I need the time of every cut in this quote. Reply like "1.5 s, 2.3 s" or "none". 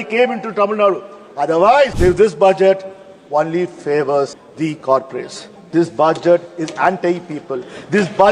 1.9 s, 4.4 s

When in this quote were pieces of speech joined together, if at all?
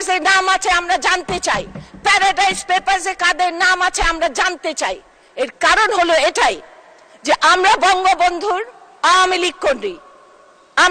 none

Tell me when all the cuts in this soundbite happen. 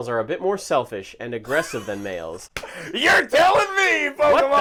none

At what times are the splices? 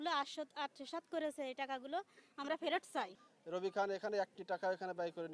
3.2 s

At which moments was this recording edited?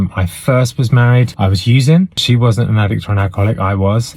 1.3 s, 2.2 s

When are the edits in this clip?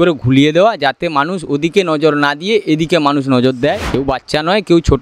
3.9 s

